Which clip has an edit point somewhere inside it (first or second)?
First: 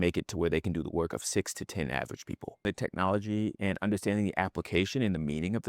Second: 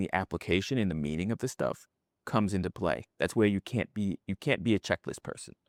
first